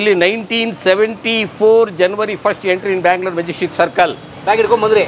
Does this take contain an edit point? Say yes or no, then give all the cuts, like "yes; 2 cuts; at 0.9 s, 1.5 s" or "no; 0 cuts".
no; 0 cuts